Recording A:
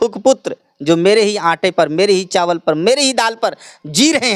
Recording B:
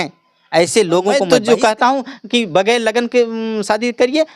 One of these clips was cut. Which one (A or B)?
B